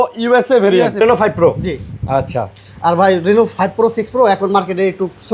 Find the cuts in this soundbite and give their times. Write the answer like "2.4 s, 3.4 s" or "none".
1.0 s